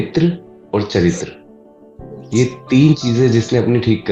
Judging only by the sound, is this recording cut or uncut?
uncut